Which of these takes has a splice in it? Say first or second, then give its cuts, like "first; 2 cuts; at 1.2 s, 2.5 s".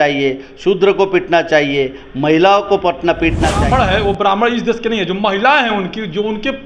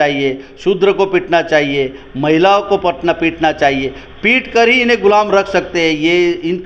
first; 1 cut; at 3.6 s